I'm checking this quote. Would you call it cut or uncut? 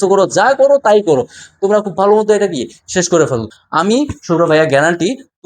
cut